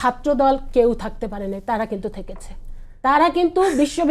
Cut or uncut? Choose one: uncut